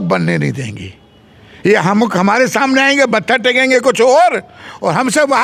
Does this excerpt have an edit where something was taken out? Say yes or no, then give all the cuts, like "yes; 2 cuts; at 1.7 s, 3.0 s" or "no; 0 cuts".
no; 0 cuts